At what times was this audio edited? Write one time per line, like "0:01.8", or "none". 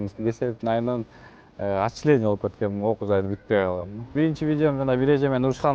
0:04.1